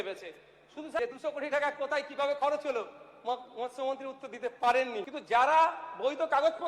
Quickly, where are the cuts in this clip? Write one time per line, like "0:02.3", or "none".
0:01.0
0:05.1